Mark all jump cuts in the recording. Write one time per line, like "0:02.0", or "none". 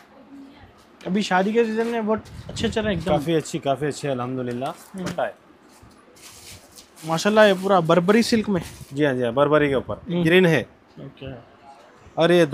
0:05.1
0:10.2